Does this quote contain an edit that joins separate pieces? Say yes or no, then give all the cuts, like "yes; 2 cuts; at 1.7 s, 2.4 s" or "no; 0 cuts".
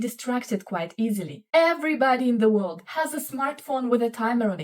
yes; 1 cut; at 1.4 s